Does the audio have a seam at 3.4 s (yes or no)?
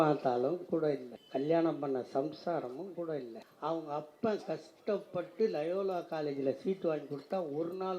yes